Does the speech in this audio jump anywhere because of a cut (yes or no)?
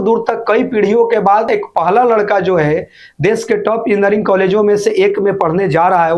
yes